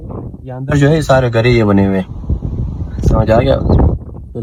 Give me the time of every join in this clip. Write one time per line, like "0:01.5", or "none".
none

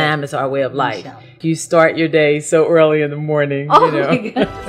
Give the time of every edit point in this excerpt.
0:01.4

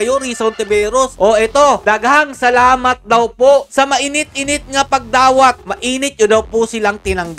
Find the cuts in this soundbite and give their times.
0:01.1
0:05.7

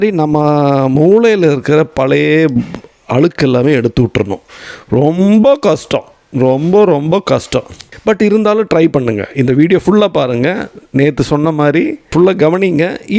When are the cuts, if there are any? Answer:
none

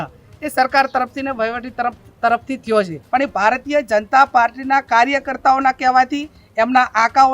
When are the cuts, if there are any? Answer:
0:03.0

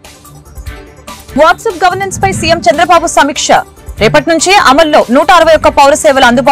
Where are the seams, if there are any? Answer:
0:01.3

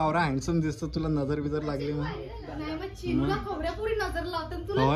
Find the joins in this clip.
none

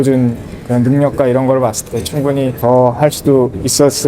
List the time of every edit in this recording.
0:02.5

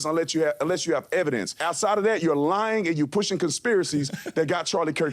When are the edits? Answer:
0:01.5

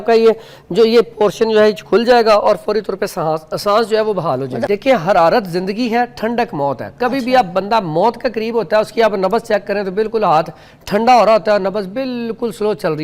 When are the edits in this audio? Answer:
0:04.6

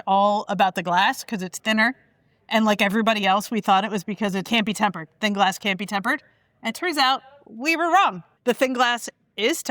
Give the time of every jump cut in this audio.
0:04.4
0:08.3

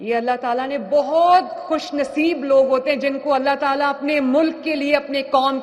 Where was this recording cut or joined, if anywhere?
none

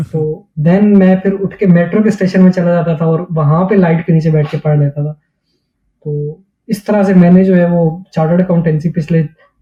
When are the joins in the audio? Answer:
none

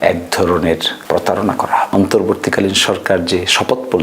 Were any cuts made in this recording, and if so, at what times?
0:00.9
0:01.9

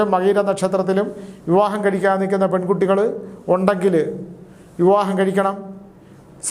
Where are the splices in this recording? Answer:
none

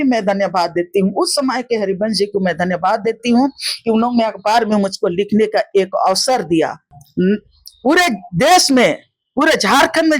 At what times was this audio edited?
0:07.0

